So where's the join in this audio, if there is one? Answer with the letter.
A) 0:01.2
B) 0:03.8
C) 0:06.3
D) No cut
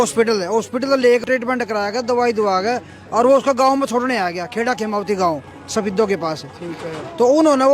A